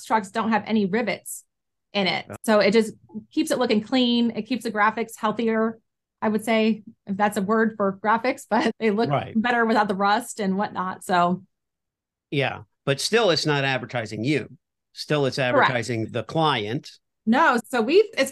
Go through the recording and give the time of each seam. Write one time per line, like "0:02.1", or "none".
0:02.3